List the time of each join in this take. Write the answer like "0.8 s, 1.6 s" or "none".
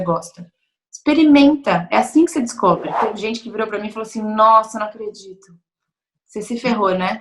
3.0 s